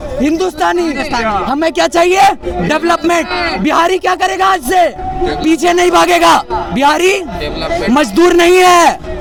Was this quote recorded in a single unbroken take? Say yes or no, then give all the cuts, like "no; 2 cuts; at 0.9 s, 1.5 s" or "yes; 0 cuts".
yes; 0 cuts